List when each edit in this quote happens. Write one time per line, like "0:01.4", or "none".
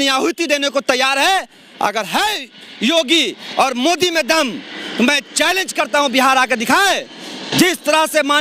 none

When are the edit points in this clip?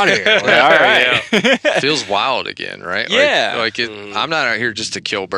0:01.8

